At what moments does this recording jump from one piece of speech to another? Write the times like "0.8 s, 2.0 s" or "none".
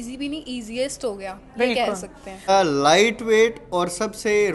2.5 s